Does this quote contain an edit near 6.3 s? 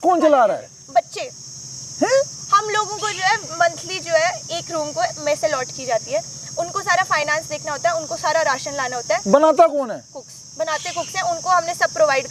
no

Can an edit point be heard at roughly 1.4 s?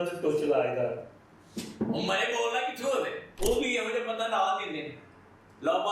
no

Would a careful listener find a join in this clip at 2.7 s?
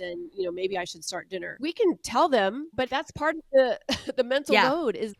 yes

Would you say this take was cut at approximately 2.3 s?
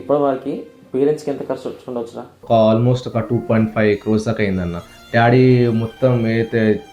yes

